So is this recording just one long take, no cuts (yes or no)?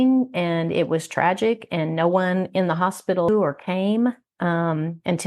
no